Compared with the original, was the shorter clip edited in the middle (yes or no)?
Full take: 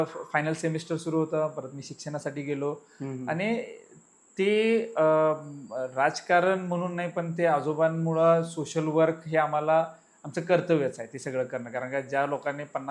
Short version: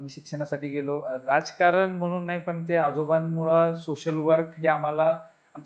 yes